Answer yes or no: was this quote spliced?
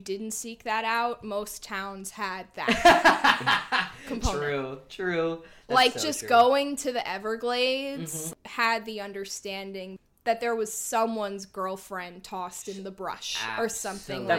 yes